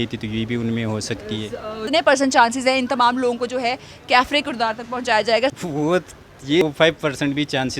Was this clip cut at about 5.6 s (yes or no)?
yes